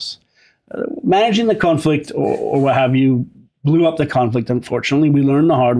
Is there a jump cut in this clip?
no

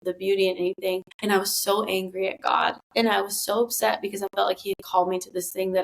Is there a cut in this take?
yes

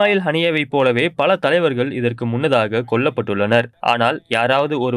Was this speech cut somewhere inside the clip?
yes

